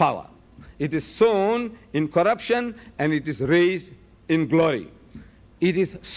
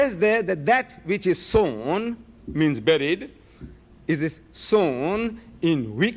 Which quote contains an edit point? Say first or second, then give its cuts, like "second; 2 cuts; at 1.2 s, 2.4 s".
second; 1 cut; at 3.9 s